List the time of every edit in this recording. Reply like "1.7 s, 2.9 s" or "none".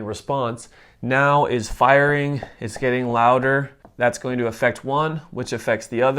3.8 s